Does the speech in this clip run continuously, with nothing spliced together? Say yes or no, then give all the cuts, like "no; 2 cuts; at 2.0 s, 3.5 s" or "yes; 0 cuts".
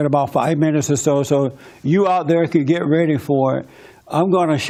yes; 0 cuts